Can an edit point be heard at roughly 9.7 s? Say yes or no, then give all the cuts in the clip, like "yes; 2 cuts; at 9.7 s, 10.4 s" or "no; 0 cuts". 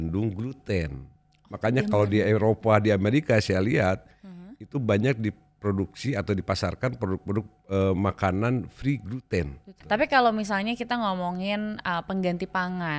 yes; 1 cut; at 9.7 s